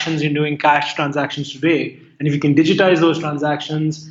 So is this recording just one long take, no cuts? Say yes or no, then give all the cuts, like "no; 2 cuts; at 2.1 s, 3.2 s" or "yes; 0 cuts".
yes; 0 cuts